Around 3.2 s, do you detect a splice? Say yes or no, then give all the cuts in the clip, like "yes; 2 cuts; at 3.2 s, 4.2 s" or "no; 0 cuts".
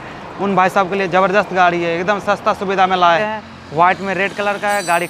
yes; 1 cut; at 3.2 s